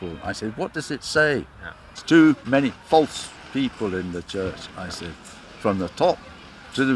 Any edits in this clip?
yes; 1 cut; at 2.0 s

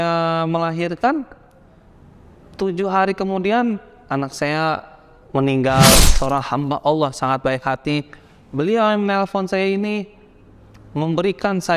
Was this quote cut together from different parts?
yes; 1 cut; at 6.0 s

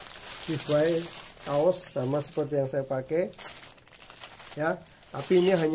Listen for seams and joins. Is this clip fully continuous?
yes; 0 cuts

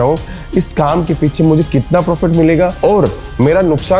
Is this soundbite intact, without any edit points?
yes; 0 cuts

